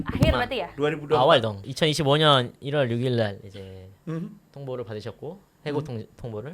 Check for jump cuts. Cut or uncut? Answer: cut